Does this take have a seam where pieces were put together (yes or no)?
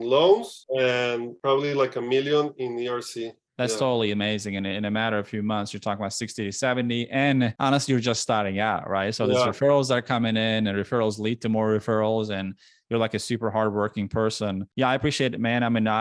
no